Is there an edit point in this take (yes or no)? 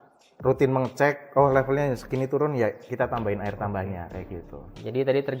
no